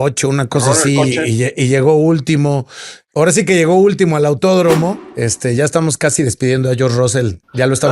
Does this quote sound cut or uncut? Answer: cut